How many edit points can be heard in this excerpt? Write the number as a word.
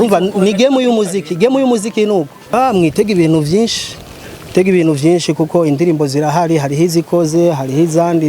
one